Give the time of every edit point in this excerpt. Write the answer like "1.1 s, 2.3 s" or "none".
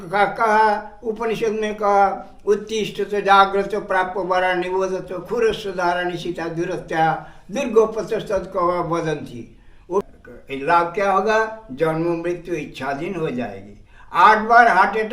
10.0 s